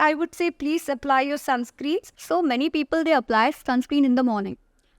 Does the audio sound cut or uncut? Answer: cut